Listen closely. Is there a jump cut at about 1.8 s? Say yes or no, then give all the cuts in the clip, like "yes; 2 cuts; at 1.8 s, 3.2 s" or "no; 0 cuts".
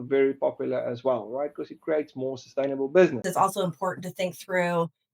no; 1 cut; at 3.2 s